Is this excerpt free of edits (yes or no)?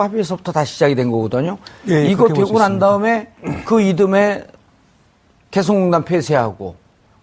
yes